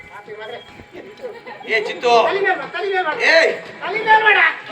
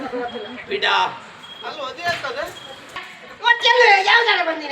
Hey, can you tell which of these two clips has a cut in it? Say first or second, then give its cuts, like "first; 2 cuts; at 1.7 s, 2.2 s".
second; 1 cut; at 3.1 s